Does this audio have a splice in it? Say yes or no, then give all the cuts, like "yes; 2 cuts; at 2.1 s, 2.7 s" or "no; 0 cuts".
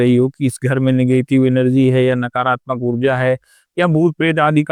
no; 0 cuts